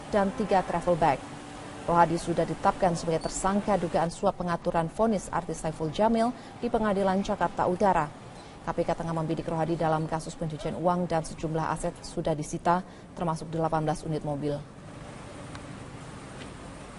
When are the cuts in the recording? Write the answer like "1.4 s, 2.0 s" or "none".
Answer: none